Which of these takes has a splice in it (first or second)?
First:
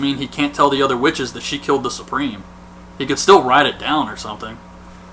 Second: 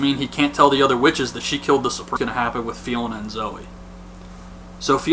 first